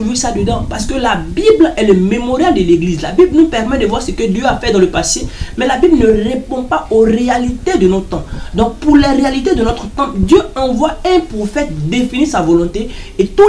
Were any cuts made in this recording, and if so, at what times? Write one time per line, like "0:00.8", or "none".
none